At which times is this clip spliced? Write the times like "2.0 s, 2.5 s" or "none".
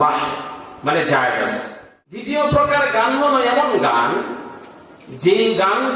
2.2 s